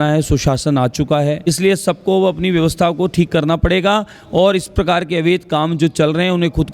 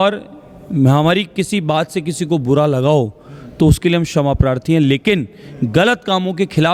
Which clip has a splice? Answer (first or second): first